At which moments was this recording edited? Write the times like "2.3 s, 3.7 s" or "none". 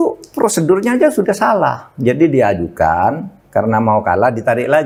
none